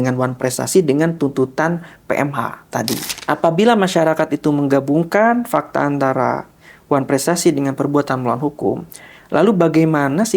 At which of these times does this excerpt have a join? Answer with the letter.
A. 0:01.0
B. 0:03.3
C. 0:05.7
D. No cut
B